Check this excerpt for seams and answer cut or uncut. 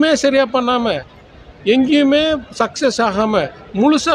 uncut